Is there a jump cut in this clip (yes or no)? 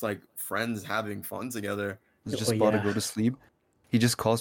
yes